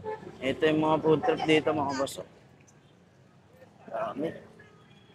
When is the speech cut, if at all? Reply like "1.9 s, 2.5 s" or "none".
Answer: none